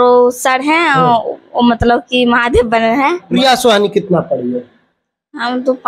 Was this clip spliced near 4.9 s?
no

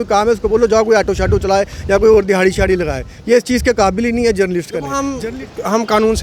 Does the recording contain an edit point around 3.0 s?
no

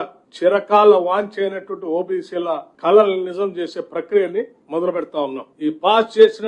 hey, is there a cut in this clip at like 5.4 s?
yes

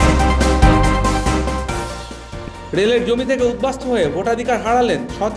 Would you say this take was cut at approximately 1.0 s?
no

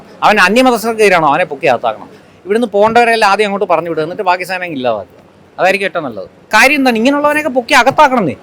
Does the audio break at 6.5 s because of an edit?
yes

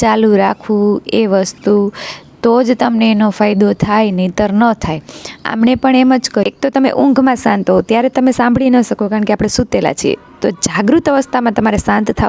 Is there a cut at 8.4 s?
no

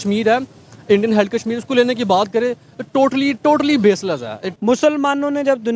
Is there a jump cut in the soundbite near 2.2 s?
no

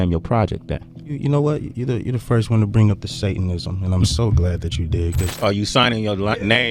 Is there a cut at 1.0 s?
yes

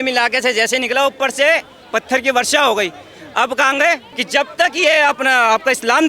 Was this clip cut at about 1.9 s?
no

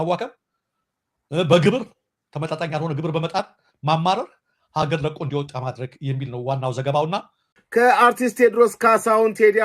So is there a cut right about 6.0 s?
no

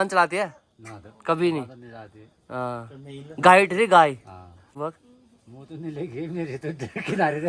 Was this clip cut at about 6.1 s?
no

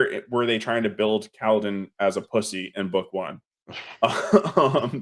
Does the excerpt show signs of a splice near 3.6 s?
no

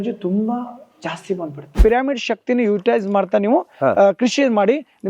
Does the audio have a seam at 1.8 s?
yes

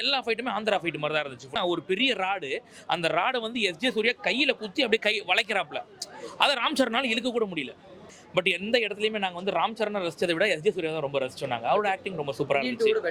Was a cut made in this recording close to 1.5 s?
yes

